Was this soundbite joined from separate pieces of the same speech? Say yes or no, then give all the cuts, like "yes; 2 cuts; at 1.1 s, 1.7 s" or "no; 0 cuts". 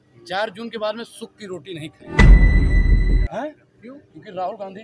yes; 2 cuts; at 2.0 s, 3.2 s